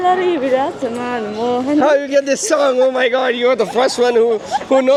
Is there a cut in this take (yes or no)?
no